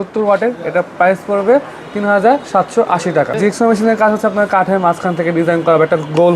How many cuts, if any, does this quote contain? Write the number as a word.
one